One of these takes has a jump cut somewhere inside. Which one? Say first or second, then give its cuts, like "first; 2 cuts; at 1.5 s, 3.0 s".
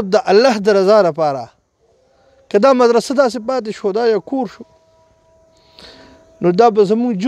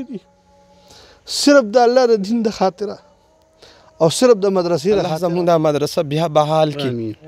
second; 1 cut; at 5.1 s